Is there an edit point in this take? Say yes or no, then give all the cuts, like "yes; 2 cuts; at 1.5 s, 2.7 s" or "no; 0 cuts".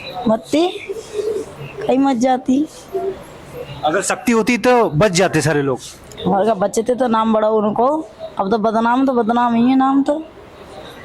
no; 0 cuts